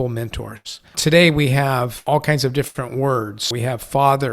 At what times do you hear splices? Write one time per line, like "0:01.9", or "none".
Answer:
0:00.9
0:02.0
0:03.4